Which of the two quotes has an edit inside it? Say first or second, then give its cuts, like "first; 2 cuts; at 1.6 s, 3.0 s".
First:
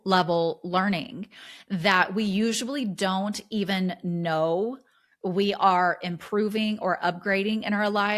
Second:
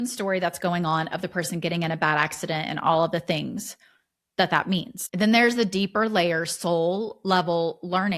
second; 1 cut; at 5.0 s